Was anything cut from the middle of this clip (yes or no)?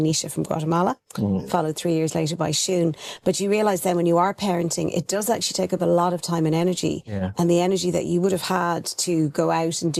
no